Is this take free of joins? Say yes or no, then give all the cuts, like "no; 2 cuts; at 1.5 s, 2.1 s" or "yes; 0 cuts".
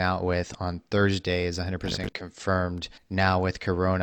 no; 1 cut; at 2.9 s